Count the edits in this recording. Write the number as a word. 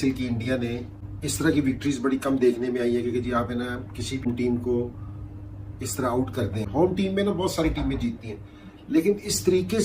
one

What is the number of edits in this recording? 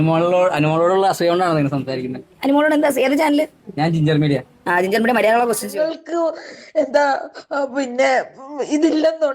one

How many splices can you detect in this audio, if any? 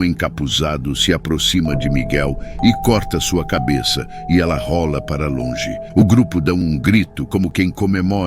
one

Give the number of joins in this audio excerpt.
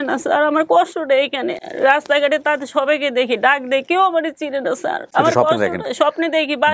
zero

